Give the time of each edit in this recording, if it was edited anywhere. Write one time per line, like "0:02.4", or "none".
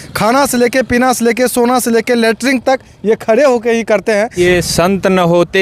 0:04.3

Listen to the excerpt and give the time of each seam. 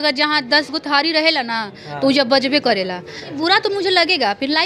0:03.3

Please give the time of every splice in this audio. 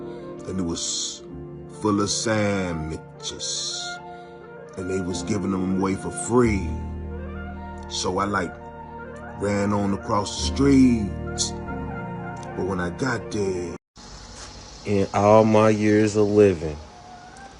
0:13.9

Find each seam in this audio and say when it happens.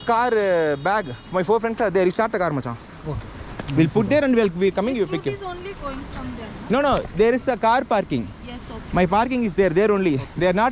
none

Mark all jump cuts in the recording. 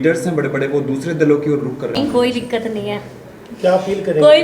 0:02.0

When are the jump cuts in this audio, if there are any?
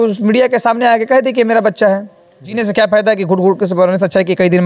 0:02.5

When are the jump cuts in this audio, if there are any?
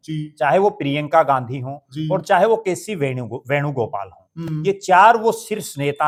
none

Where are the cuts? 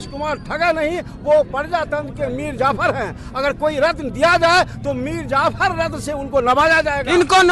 none

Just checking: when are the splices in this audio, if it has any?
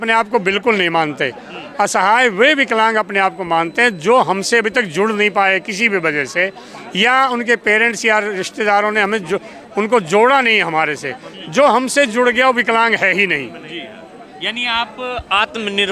none

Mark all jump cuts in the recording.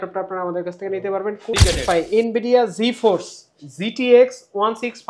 0:01.5

